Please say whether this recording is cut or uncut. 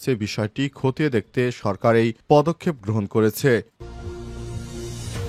cut